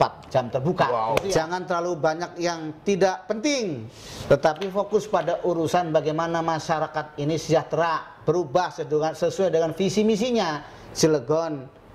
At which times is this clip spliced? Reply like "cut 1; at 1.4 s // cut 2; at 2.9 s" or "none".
cut 1; at 1.4 s